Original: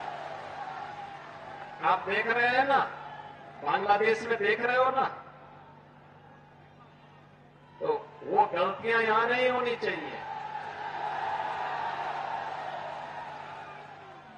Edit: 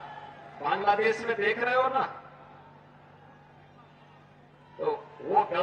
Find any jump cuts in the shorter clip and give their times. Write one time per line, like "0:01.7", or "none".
none